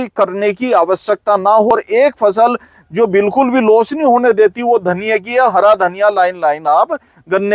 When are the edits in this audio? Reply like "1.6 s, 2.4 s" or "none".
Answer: 1.7 s